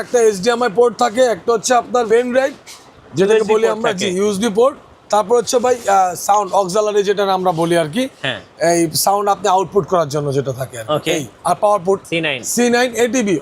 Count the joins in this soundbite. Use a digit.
1